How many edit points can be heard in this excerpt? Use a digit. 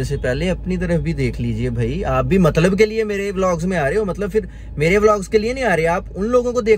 0